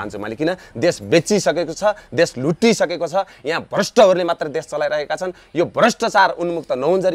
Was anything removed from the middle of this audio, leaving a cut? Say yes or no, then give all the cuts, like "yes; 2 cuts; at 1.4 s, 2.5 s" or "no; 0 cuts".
no; 0 cuts